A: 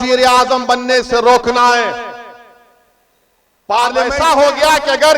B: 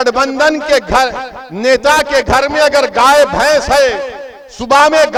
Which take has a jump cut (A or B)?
A